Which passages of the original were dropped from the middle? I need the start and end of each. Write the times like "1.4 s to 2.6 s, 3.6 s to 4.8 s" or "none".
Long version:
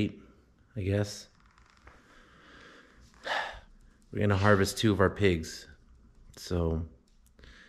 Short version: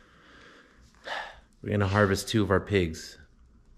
3.6 s to 3.9 s